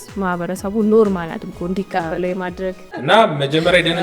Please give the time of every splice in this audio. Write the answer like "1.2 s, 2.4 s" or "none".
2.9 s